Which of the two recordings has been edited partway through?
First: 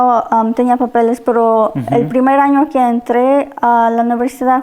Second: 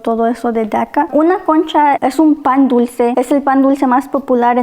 second; 3 cuts; at 1.1 s, 2.0 s, 3.1 s

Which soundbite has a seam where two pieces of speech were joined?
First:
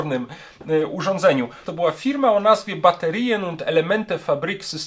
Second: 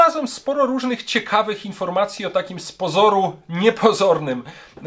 first; 1 cut; at 1.6 s

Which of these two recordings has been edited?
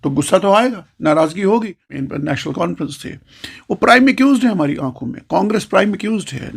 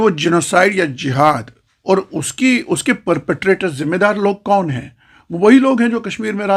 first; 1 cut; at 2.1 s

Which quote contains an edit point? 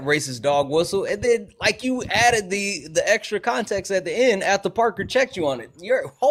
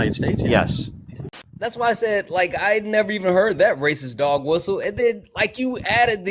second; 1 cut; at 1.2 s

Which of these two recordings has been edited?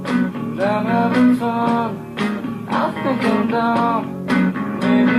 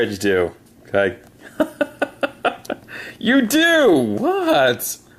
second; 1 cut; at 3.5 s

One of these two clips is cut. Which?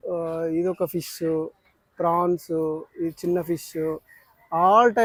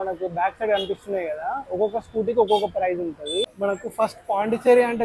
second; 1 cut; at 3.5 s

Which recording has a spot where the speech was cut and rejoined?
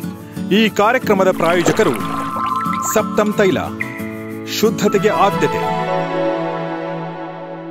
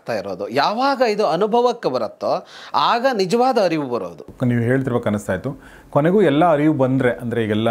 second; 1 cut; at 4.2 s

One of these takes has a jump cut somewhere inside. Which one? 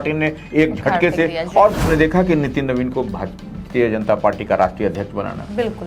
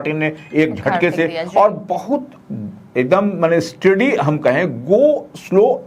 first; 1 cut; at 1.8 s

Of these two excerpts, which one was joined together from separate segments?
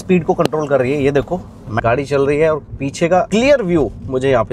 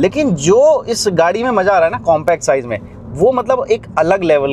first; 2 cuts; at 1.8 s, 3.3 s

